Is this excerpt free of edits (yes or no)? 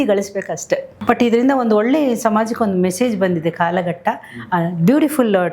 no